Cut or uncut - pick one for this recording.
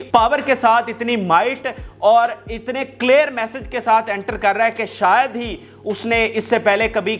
uncut